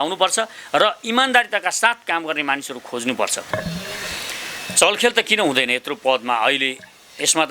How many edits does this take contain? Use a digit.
1